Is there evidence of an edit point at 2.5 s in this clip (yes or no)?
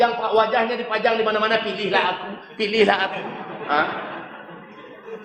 no